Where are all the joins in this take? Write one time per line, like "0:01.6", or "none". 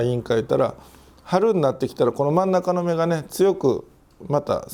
none